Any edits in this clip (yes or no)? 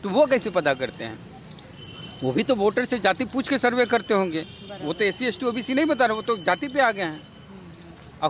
no